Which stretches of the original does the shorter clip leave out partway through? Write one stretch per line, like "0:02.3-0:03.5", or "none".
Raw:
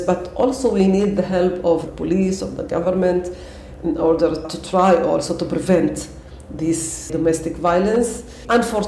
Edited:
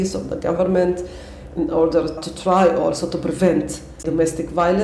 0:06.2-0:07.0